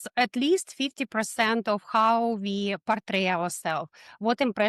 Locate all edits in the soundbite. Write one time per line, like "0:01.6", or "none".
none